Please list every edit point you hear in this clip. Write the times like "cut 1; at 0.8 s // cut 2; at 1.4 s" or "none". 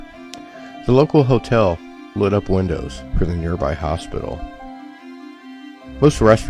cut 1; at 4.5 s